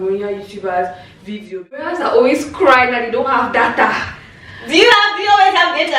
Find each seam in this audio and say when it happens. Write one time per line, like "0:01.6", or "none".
0:01.9